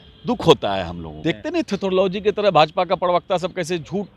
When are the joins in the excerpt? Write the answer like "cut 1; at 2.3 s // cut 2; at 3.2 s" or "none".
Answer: cut 1; at 1.0 s